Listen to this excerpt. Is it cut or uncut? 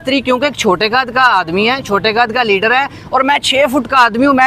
uncut